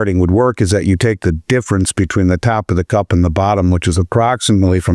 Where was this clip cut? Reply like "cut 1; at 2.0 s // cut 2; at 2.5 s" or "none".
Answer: none